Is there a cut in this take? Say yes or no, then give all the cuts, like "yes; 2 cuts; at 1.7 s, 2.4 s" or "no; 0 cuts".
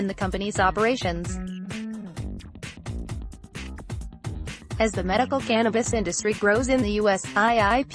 yes; 2 cuts; at 1.6 s, 4.8 s